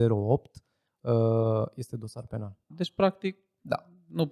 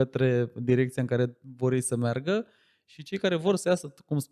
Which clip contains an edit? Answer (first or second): first